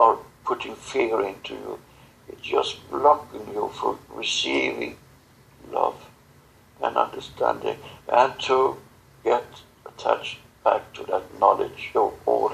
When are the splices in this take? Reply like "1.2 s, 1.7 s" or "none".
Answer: none